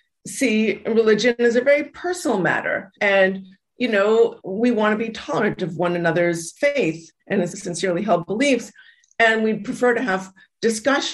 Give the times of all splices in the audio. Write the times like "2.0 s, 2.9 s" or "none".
2.9 s, 6.5 s, 7.5 s